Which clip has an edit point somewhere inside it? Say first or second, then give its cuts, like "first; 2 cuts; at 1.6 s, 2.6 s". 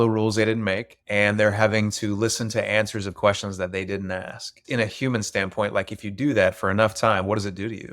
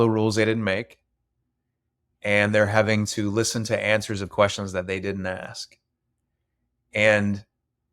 first; 2 cuts; at 0.9 s, 4.6 s